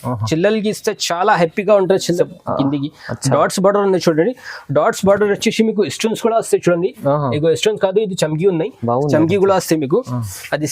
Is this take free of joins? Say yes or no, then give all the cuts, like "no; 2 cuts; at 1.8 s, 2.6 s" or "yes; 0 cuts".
no; 1 cut; at 2.2 s